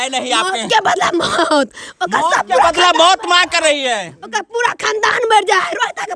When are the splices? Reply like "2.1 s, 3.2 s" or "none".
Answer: none